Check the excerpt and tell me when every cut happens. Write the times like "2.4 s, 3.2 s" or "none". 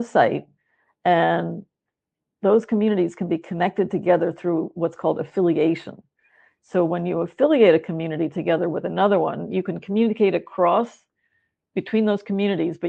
none